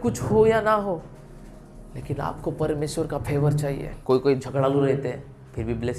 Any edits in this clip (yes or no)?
yes